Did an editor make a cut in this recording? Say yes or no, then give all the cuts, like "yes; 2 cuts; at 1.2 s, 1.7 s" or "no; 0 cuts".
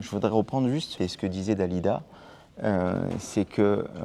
yes; 1 cut; at 0.9 s